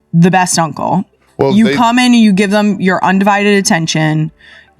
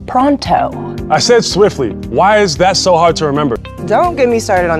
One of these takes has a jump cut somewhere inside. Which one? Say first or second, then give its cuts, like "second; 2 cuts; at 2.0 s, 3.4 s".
second; 1 cut; at 3.8 s